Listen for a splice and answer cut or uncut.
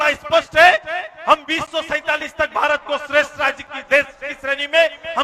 uncut